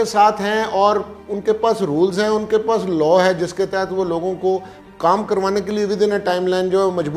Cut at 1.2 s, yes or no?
no